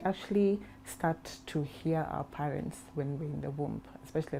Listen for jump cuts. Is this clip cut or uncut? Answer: uncut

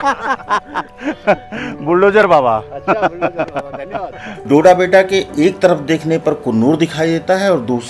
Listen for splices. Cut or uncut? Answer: cut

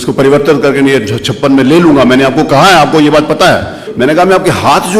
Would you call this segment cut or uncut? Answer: cut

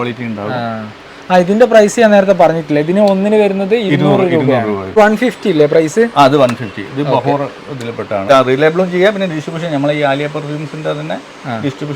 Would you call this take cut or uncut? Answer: cut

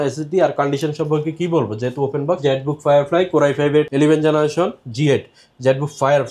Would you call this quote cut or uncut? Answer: cut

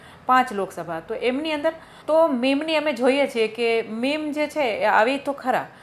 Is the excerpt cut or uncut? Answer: cut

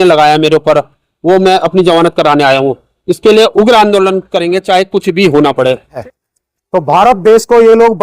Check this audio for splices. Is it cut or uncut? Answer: cut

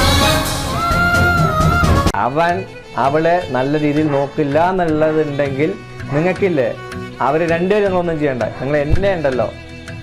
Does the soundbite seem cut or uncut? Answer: cut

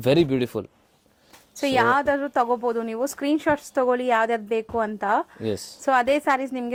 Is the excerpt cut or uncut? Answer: uncut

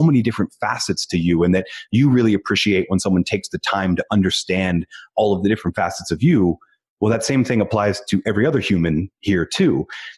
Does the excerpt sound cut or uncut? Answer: uncut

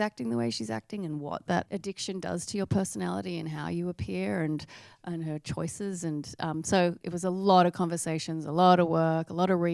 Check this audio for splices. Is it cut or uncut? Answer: cut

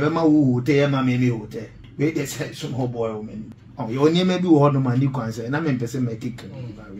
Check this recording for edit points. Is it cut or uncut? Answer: cut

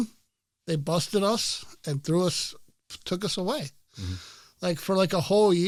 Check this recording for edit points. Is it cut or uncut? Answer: uncut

